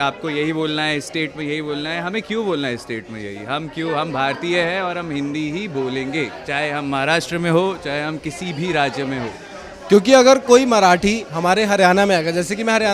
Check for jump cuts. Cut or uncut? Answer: uncut